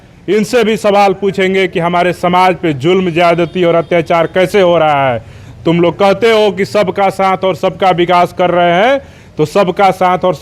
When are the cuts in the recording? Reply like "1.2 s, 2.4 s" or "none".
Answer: none

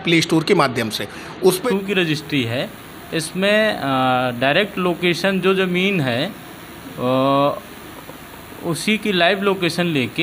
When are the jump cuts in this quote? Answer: 1.6 s

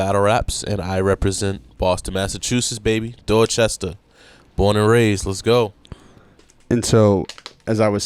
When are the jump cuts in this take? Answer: none

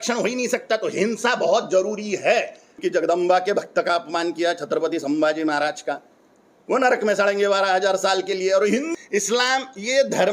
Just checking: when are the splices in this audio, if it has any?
2.8 s, 8.9 s

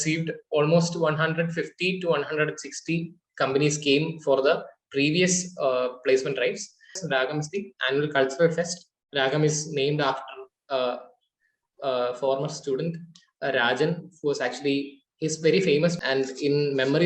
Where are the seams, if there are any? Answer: 7.0 s, 16.0 s

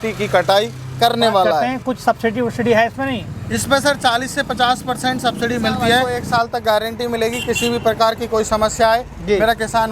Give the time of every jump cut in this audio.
1.7 s, 6.2 s

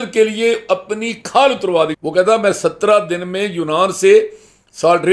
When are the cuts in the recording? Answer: 2.0 s

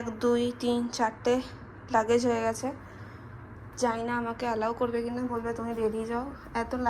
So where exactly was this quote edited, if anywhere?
none

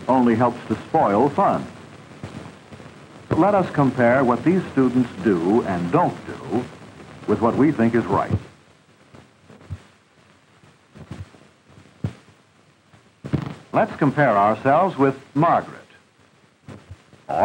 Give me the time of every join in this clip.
4.2 s

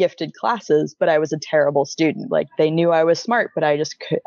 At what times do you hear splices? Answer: 2.2 s

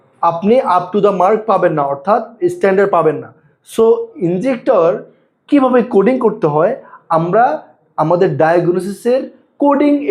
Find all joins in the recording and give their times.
none

